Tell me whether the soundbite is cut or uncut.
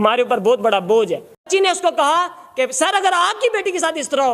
cut